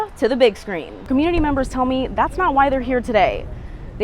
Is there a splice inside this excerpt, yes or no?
yes